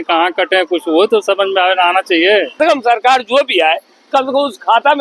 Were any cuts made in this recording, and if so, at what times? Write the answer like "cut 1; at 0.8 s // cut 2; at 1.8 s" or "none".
cut 1; at 2.5 s